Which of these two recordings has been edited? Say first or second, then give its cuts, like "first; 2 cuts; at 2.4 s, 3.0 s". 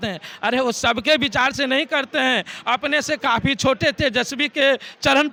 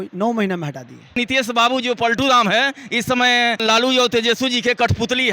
second; 2 cuts; at 1.2 s, 3.6 s